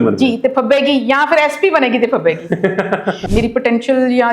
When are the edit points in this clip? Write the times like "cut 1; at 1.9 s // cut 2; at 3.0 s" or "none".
cut 1; at 3.2 s